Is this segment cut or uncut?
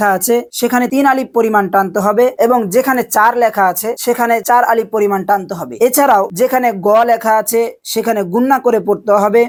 uncut